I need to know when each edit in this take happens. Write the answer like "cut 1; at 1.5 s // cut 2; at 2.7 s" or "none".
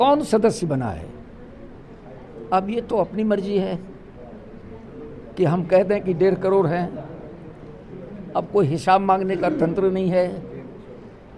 none

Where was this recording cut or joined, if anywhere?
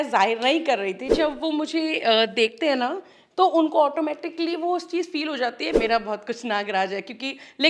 cut 1; at 1.1 s // cut 2; at 5.8 s

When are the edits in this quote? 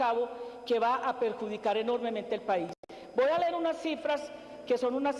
cut 1; at 2.8 s

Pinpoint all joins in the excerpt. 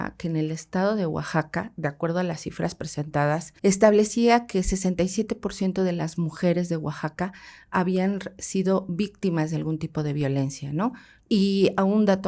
cut 1; at 3.5 s // cut 2; at 11.1 s

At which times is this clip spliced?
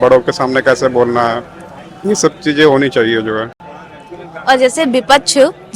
none

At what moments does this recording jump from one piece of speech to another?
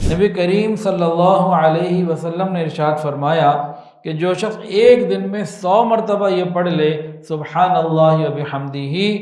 none

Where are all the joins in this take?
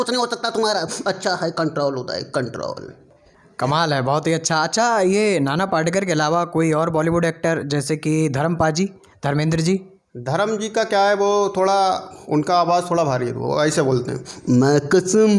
none

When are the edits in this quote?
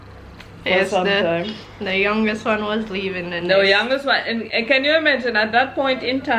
none

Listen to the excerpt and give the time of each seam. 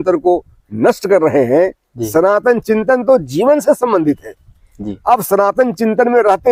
none

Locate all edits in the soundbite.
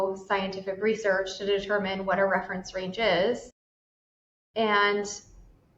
cut 1; at 3.8 s

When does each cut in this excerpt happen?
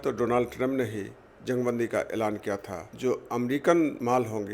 cut 1; at 2.9 s

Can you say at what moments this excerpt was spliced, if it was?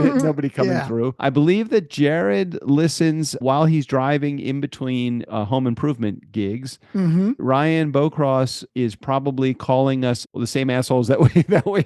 cut 1; at 1.2 s // cut 2; at 3.4 s // cut 3; at 5.3 s // cut 4; at 7.4 s // cut 5; at 8.6 s // cut 6; at 10.4 s

